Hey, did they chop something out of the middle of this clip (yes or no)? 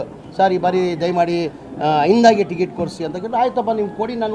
no